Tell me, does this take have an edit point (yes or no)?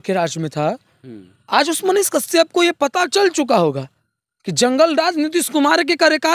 no